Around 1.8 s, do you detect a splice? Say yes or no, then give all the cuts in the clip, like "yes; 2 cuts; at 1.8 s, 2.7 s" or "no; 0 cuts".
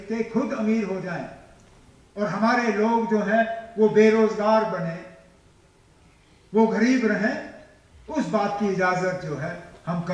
no; 0 cuts